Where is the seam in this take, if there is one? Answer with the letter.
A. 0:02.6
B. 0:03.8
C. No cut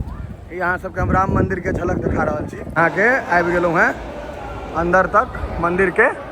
A